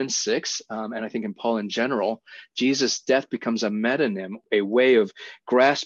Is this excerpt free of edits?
no; 1 cut; at 4.4 s

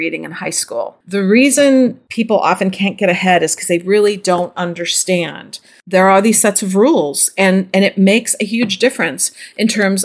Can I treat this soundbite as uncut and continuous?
no; 2 cuts; at 1.0 s, 2.0 s

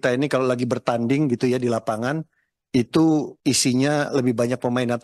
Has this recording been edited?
no; 0 cuts

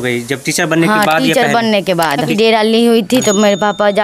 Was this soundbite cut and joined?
yes; 1 cut; at 2.3 s

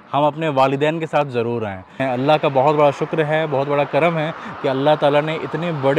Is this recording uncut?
no; 1 cut; at 2.0 s

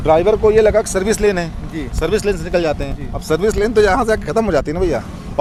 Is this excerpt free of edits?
yes; 0 cuts

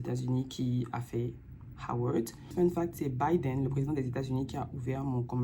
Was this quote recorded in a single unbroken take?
no; 1 cut; at 2.4 s

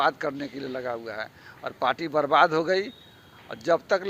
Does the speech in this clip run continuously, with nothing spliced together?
yes; 0 cuts

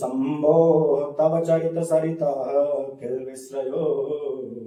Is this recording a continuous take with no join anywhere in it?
yes; 0 cuts

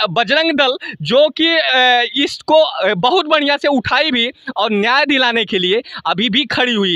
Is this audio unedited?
yes; 0 cuts

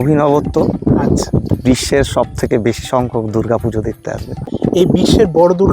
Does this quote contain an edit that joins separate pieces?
yes; 1 cut; at 4.5 s

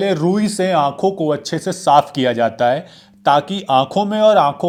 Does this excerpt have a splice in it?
no; 0 cuts

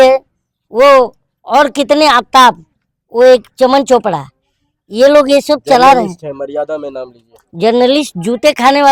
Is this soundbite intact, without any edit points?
yes; 0 cuts

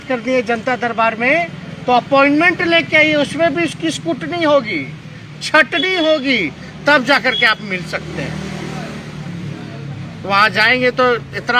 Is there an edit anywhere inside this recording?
no; 0 cuts

